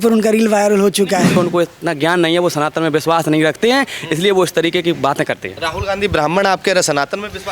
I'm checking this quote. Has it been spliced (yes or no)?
yes